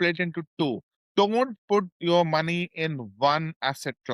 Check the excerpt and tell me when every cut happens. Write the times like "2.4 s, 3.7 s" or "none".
0.9 s